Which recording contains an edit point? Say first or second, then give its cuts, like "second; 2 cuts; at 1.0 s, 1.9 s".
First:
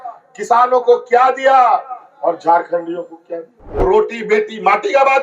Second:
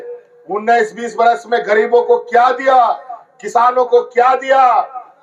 first; 1 cut; at 3.8 s